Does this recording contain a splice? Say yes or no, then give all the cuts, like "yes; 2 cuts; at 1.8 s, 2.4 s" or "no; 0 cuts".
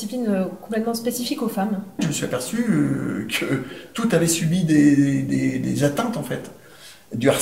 yes; 1 cut; at 2.0 s